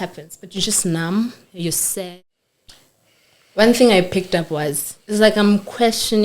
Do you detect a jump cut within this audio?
yes; 1 cut; at 2.1 s

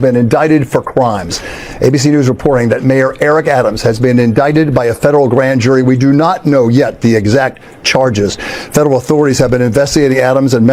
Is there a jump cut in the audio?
no; 0 cuts

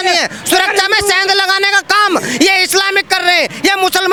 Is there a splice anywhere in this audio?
no; 0 cuts

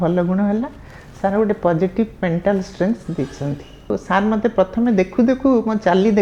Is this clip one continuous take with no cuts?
no; 1 cut; at 3.9 s

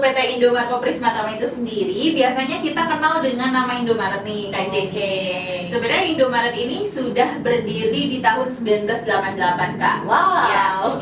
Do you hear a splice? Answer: no; 0 cuts

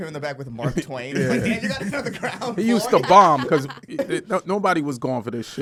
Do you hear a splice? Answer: no; 0 cuts

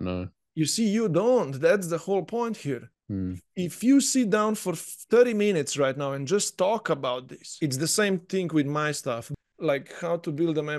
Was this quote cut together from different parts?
yes; 2 cuts; at 7.6 s, 9.3 s

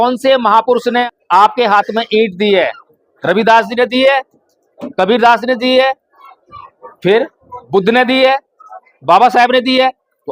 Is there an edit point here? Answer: yes; 1 cut; at 1.0 s

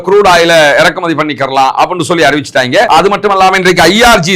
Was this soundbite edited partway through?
yes; 1 cut; at 2.9 s

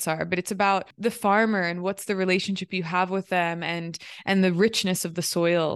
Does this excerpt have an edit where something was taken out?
yes; 1 cut; at 0.9 s

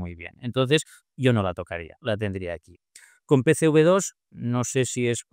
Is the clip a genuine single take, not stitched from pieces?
yes; 0 cuts

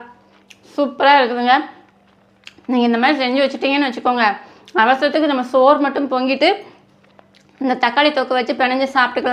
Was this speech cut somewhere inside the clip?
no; 0 cuts

